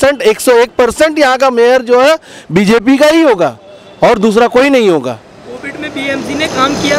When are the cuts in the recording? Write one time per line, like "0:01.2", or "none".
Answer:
none